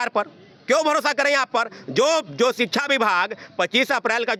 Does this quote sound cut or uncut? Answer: uncut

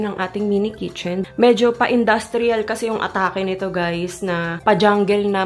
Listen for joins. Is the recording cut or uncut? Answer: cut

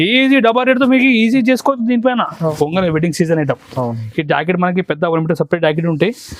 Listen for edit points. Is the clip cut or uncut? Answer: cut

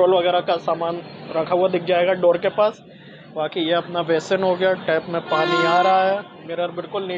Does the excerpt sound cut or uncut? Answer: uncut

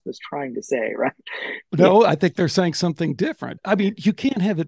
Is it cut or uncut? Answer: cut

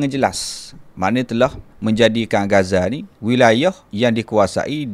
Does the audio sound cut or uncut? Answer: cut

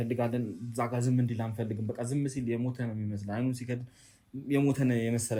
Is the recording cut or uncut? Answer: uncut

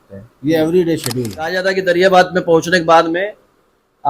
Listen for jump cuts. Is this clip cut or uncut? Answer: cut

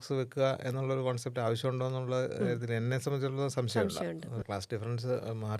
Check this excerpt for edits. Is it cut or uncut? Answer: cut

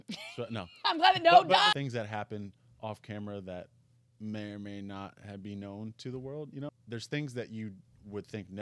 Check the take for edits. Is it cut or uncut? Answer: cut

